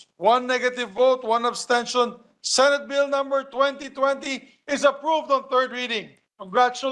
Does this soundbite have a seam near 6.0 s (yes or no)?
yes